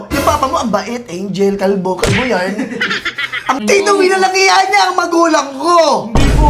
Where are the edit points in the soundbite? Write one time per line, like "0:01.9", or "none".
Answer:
0:03.6